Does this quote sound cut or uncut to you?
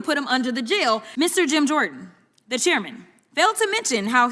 cut